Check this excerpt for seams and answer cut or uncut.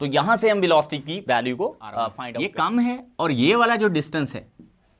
cut